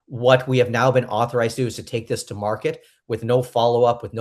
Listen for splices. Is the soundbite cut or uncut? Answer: uncut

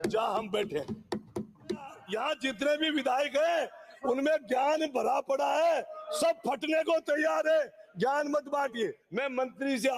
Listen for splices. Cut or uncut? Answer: cut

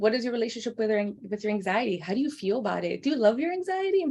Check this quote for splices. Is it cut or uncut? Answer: uncut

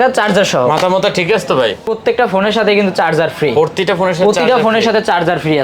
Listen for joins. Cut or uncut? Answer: cut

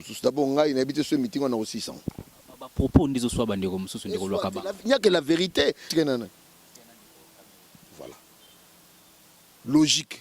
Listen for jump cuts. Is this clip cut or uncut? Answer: cut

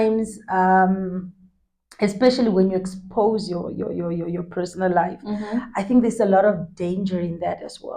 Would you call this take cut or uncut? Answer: uncut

